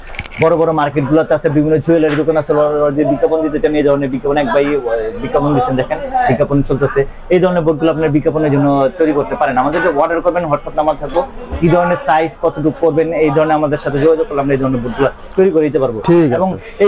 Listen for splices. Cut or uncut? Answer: uncut